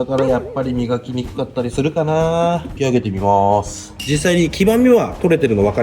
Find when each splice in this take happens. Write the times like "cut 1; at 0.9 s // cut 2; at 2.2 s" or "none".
cut 1; at 2.7 s // cut 2; at 3.9 s